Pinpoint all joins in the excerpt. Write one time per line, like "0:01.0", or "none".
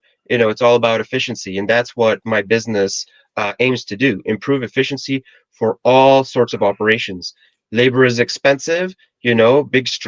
none